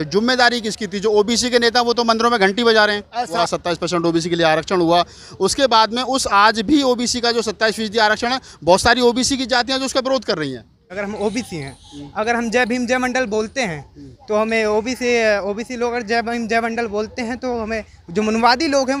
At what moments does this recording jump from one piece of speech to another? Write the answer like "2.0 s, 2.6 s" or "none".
3.4 s, 10.9 s